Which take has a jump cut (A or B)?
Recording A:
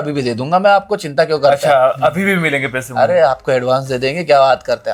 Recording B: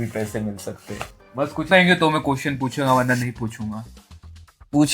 B